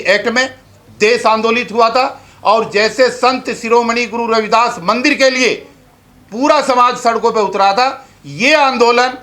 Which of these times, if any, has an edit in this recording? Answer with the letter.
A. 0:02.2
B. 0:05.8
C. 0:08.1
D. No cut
D